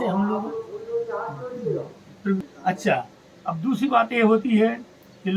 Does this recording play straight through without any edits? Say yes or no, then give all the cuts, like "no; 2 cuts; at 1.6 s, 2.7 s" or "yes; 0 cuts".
no; 1 cut; at 2.4 s